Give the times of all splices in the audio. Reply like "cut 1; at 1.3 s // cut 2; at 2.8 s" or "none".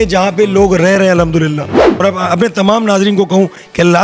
cut 1; at 1.8 s